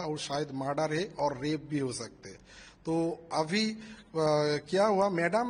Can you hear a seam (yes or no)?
no